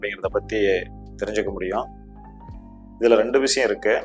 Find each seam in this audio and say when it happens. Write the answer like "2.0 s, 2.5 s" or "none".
none